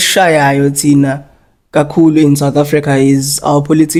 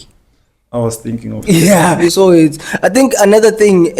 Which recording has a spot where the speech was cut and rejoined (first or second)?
second